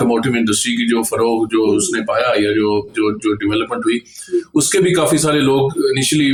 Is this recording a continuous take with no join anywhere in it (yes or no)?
yes